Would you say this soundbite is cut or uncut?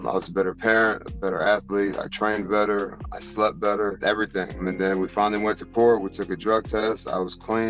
uncut